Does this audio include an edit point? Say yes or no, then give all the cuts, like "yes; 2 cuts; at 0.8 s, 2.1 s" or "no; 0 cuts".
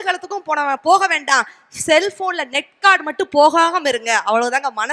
no; 0 cuts